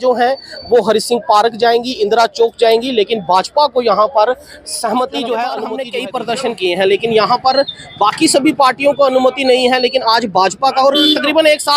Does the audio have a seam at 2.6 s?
no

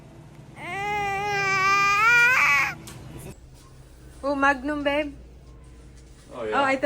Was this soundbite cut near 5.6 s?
no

